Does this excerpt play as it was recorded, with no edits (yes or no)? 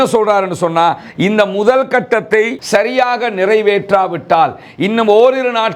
no